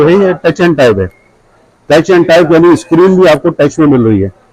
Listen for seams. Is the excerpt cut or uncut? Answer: uncut